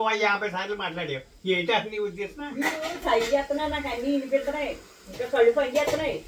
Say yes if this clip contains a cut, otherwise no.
no